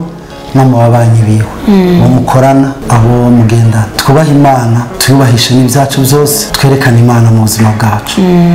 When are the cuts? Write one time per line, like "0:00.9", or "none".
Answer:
0:01.5
0:02.8
0:03.9
0:04.9
0:06.5